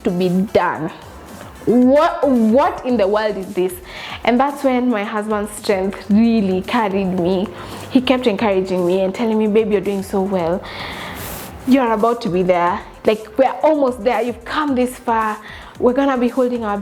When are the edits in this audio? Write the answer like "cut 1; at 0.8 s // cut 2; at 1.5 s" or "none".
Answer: none